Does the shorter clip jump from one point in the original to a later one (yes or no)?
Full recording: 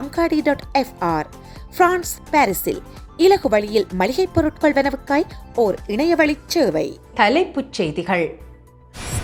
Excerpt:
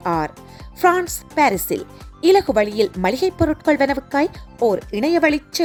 no